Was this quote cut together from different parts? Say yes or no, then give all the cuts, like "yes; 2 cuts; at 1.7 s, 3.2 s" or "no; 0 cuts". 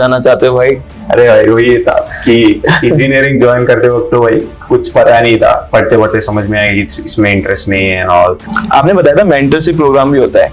yes; 2 cuts; at 5.6 s, 8.4 s